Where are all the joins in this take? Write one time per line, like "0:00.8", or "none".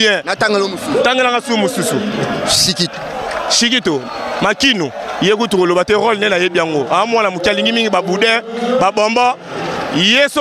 none